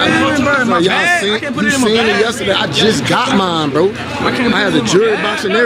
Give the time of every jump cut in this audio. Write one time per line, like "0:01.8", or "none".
none